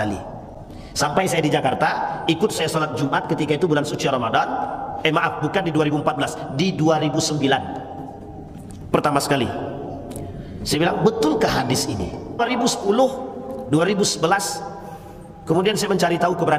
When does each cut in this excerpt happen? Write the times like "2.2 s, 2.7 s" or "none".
12.4 s